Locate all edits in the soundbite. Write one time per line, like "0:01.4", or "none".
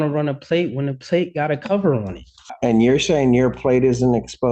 0:02.4